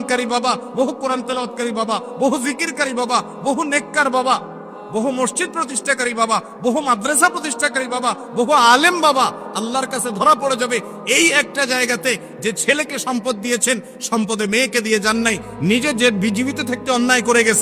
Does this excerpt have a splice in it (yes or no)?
no